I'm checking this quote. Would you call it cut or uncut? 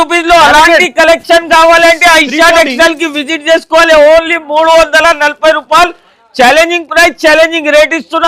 uncut